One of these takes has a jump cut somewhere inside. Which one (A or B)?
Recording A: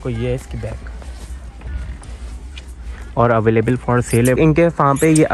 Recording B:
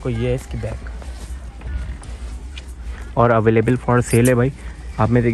A